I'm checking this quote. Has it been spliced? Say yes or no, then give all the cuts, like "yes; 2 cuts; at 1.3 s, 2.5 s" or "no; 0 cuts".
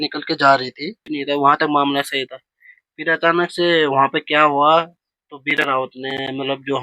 yes; 1 cut; at 1.0 s